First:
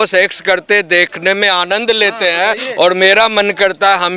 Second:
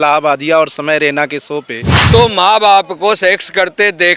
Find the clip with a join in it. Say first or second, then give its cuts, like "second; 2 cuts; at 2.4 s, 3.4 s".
second; 1 cut; at 2.0 s